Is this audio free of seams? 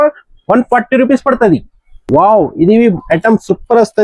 yes; 0 cuts

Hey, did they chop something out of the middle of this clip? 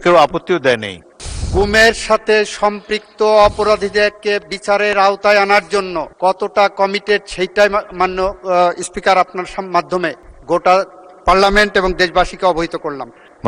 yes; 1 cut; at 1.3 s

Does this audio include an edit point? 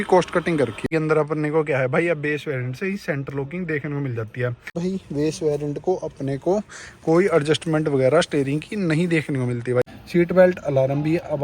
yes; 3 cuts; at 0.9 s, 4.8 s, 10.0 s

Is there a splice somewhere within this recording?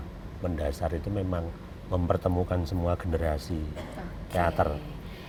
no; 0 cuts

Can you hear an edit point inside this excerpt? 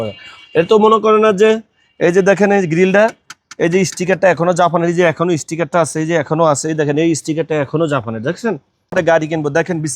yes; 1 cut; at 8.9 s

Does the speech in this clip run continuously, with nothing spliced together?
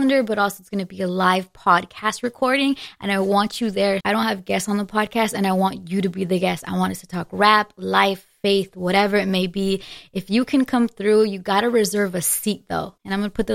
yes; 0 cuts

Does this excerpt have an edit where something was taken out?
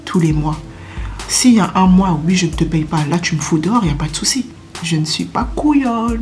yes; 1 cut; at 4.6 s

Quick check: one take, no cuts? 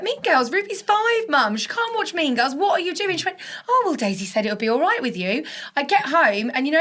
yes; 0 cuts

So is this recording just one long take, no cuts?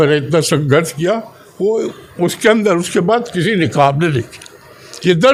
yes; 0 cuts

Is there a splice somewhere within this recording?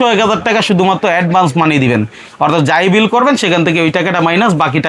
no; 0 cuts

